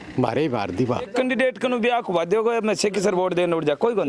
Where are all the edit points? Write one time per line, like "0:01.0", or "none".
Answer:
0:01.1

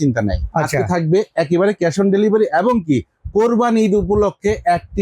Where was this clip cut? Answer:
none

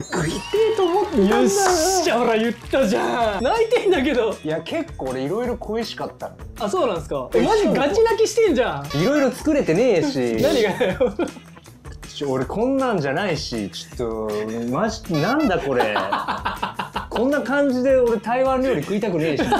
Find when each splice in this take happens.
0:03.4
0:08.8

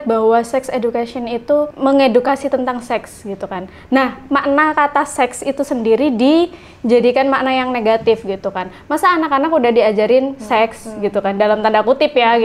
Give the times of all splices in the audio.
0:01.7

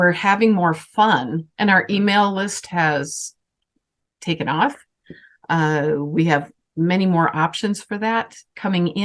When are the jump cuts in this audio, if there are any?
0:01.4

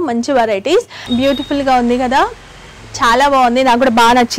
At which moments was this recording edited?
0:01.0

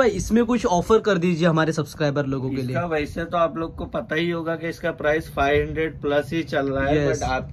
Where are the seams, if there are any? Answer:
none

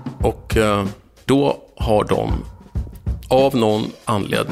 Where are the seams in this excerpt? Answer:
0:01.3

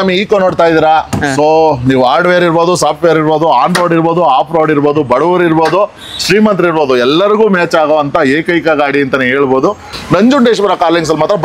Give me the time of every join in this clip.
0:09.9

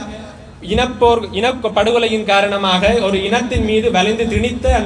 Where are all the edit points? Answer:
none

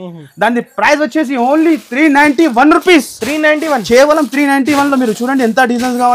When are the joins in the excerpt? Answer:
none

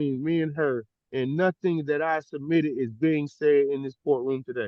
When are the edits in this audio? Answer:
none

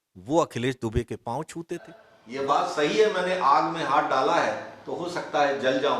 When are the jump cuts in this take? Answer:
0:02.1

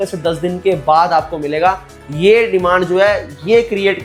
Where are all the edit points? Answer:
none

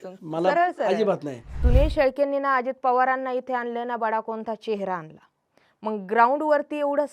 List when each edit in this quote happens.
0:01.6

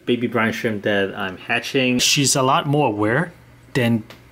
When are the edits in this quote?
0:02.1

